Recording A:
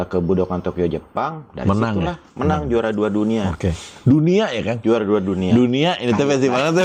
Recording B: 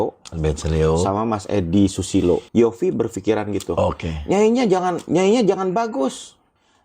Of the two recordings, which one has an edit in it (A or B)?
B